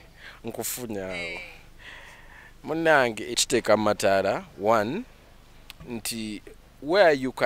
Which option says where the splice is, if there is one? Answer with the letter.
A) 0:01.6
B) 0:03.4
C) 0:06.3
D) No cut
B